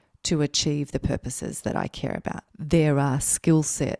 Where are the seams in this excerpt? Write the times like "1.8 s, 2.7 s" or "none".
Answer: 2.4 s

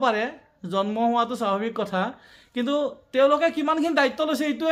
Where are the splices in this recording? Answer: none

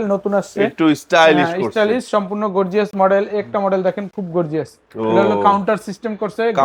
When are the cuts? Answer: none

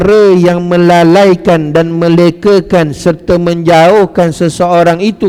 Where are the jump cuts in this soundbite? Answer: none

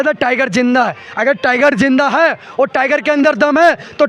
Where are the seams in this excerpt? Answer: none

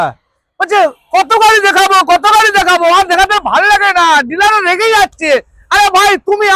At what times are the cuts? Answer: none

